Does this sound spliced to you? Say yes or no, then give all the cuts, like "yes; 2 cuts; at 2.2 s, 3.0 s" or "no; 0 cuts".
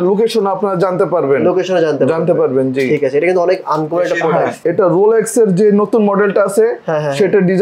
yes; 1 cut; at 4.6 s